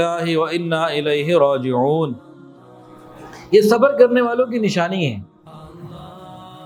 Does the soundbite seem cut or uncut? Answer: uncut